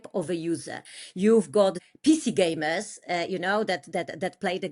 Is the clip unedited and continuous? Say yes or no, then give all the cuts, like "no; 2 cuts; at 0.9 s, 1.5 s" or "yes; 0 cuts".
no; 1 cut; at 1.8 s